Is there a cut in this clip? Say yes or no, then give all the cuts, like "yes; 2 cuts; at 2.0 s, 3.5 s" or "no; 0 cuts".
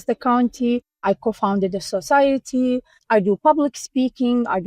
yes; 2 cuts; at 1.0 s, 2.9 s